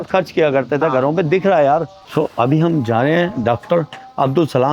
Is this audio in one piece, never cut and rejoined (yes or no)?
yes